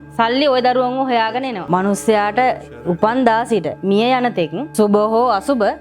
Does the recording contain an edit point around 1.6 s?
yes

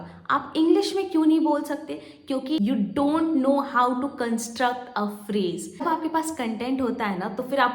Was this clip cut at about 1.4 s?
no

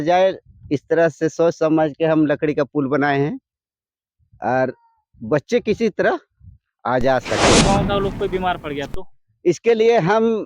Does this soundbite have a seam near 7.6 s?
yes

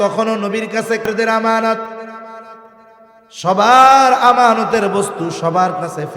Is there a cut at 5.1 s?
no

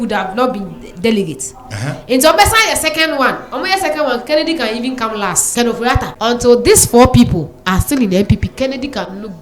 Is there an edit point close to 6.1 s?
yes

